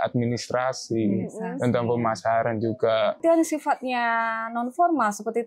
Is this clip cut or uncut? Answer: cut